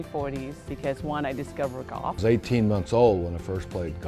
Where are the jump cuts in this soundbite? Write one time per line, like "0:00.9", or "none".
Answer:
0:02.2